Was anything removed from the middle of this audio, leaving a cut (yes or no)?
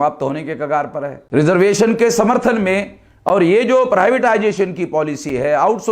yes